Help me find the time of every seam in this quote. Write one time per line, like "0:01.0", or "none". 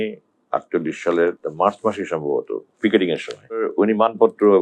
0:01.4
0:03.7

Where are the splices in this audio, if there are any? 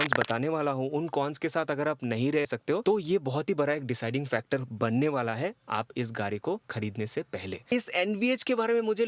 0:02.5
0:07.7

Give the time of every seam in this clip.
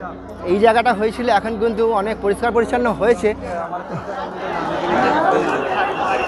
0:03.7

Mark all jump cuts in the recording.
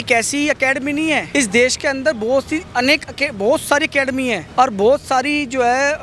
none

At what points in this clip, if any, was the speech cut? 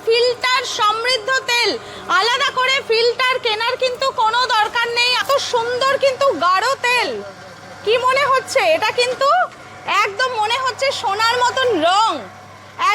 0:05.2

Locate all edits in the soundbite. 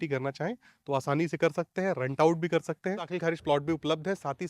0:03.1

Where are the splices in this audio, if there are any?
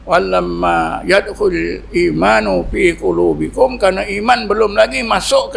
none

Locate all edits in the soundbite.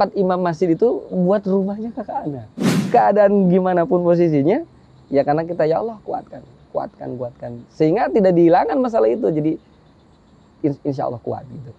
0:02.7

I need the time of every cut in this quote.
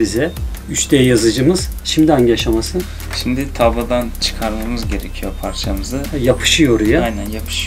none

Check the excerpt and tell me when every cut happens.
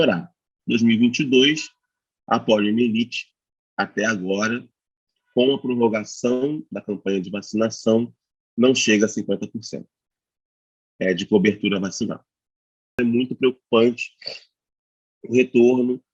0:13.0

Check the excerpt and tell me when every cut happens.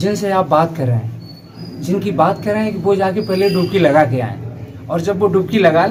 none

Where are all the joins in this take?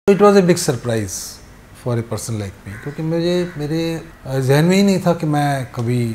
0:04.1

